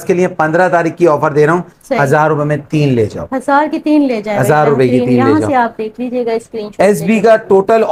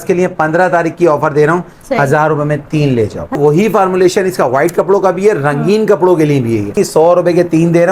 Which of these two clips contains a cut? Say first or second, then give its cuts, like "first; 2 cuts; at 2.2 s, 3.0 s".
second; 2 cuts; at 3.4 s, 6.8 s